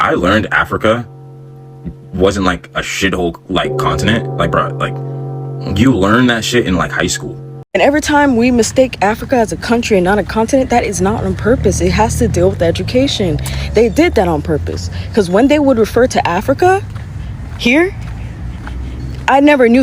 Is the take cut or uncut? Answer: cut